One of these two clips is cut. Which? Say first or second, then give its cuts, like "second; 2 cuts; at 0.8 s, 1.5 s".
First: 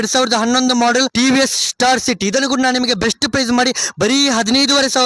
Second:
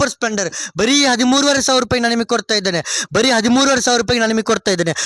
first; 1 cut; at 1.1 s